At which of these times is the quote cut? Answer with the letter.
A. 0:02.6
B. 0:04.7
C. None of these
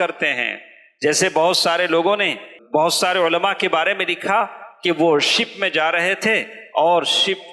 A